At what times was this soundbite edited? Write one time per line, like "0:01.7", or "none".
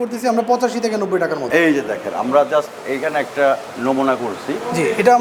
0:01.4

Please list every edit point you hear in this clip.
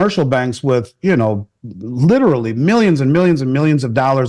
none

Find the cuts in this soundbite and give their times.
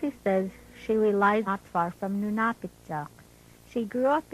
none

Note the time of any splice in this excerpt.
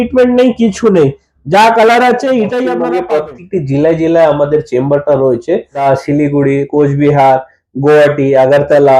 0:02.8
0:05.8

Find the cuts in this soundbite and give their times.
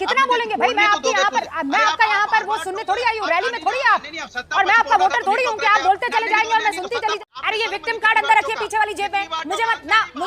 0:07.2
0:09.2

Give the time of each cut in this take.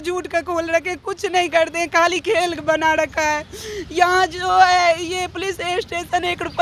none

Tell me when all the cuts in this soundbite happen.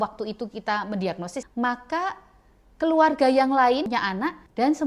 0:01.5
0:03.9

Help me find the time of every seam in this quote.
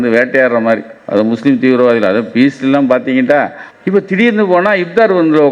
0:03.6

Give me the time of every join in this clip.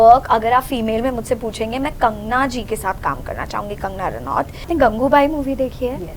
0:04.7

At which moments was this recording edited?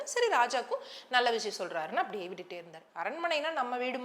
0:02.9

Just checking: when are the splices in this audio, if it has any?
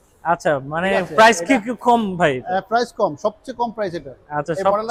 none

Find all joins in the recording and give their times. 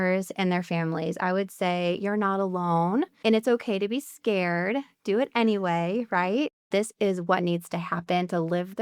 0:03.1
0:06.6

